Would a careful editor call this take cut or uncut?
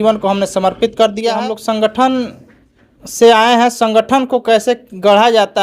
cut